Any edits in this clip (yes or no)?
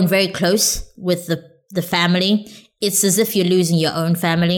no